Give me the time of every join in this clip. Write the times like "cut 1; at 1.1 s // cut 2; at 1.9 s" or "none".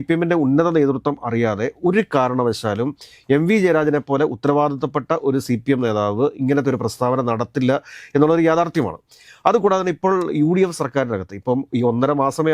none